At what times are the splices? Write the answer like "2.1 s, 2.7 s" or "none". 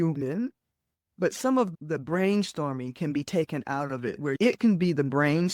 1.7 s